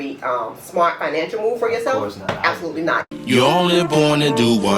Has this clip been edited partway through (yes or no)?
yes